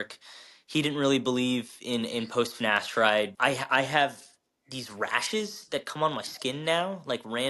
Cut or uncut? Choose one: cut